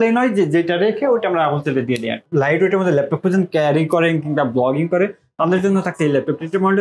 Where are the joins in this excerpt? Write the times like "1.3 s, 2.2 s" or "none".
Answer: 2.2 s

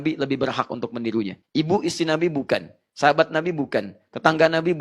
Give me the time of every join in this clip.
1.4 s

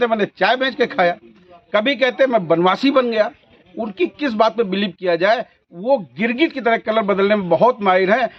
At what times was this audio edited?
none

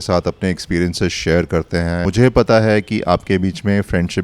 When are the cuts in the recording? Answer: 2.0 s

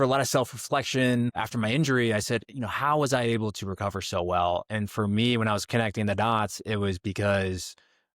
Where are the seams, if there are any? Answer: 1.4 s

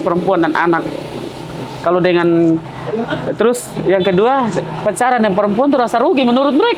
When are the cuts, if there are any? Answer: none

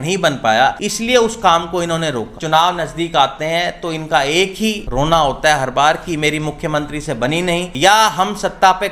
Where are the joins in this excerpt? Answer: 0.9 s, 2.3 s, 4.8 s, 7.7 s

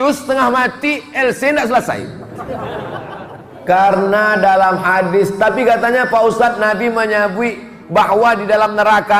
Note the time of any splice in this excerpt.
3.5 s

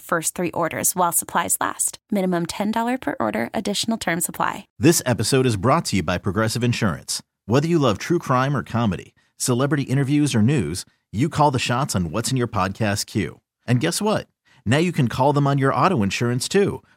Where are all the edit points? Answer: 4.7 s

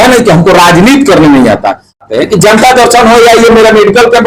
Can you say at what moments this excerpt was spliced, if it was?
2.0 s

